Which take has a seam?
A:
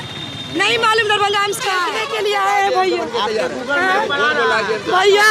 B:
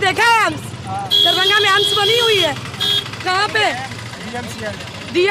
A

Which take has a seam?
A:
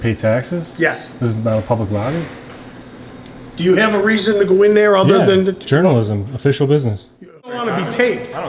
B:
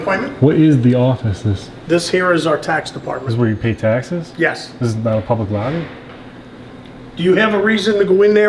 A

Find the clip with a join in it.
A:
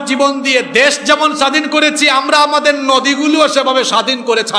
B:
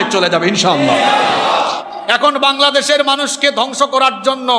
B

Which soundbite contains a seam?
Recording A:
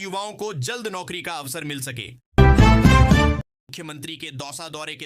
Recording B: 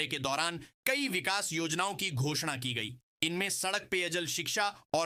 A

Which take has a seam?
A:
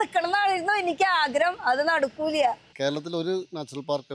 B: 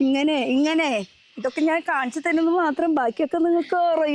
A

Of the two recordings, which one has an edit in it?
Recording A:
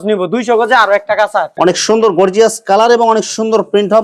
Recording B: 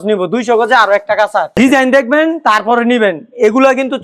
A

